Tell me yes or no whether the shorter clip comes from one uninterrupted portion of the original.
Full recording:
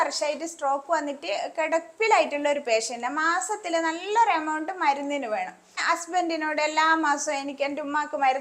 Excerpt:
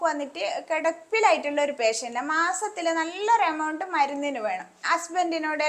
no